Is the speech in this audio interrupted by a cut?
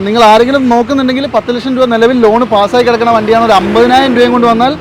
no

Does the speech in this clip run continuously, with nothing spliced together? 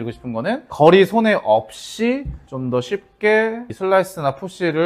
no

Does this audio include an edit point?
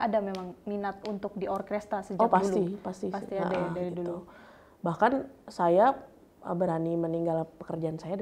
no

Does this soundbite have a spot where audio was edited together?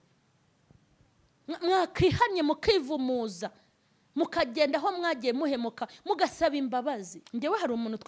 yes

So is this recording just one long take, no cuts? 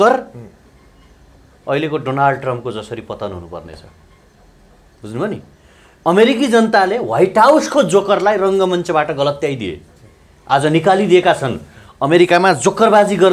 yes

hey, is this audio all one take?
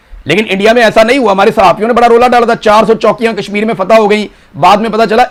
yes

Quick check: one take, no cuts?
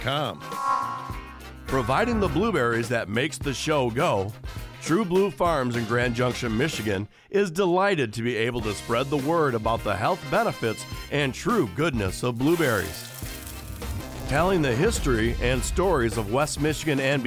yes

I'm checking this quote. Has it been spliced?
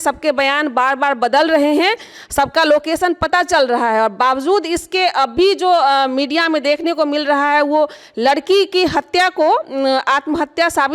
no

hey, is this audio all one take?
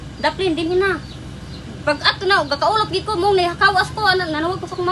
yes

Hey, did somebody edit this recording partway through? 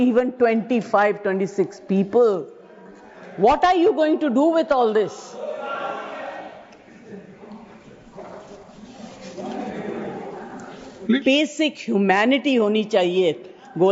no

